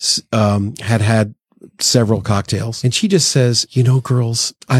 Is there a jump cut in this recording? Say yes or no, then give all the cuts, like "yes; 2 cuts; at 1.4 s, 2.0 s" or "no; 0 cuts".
yes; 2 cuts; at 2.7 s, 3.6 s